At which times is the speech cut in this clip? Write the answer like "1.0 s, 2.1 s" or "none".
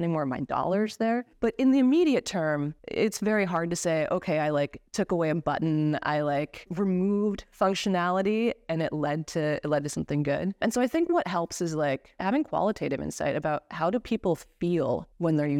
10.6 s, 12.2 s